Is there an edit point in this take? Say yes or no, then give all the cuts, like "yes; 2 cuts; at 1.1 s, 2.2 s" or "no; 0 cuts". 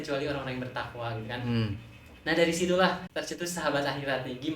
yes; 1 cut; at 3.1 s